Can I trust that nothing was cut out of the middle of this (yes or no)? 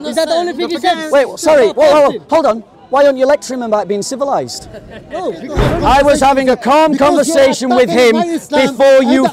no